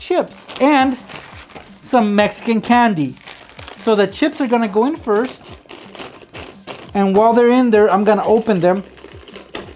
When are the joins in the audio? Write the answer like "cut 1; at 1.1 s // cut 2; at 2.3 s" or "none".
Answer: none